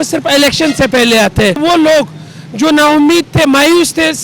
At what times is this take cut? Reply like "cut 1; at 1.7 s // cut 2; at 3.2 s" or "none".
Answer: cut 1; at 1.6 s